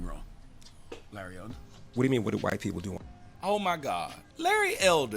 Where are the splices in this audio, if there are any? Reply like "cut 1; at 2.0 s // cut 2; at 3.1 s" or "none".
cut 1; at 4.2 s